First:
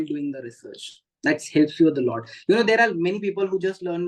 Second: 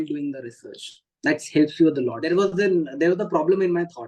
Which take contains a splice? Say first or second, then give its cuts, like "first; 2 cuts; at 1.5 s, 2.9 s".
second; 1 cut; at 2.2 s